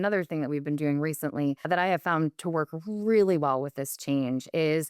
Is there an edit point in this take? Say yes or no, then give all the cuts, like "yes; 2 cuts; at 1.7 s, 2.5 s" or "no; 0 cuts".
yes; 1 cut; at 1.6 s